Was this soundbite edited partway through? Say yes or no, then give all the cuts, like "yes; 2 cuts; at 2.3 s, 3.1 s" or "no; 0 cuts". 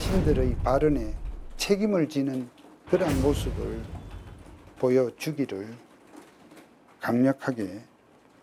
no; 0 cuts